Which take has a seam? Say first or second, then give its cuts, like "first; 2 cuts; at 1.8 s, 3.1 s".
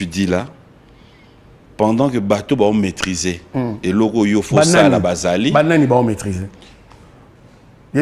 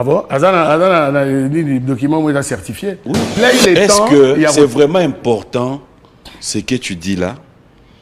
second; 1 cut; at 3.4 s